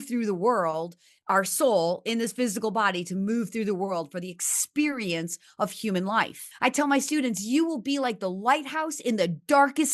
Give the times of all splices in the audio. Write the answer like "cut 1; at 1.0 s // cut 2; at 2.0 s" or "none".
cut 1; at 6.5 s